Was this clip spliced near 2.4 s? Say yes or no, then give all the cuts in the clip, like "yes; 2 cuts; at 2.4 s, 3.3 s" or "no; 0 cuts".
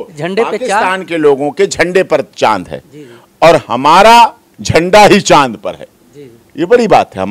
no; 0 cuts